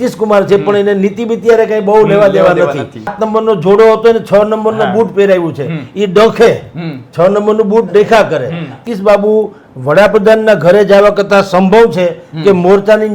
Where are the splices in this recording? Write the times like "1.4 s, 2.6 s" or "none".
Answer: 3.2 s, 8.8 s